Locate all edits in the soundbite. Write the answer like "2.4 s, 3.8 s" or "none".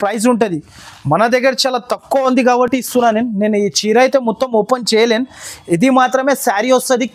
none